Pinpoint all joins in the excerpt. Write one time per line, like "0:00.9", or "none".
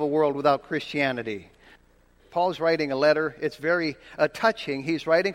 0:02.0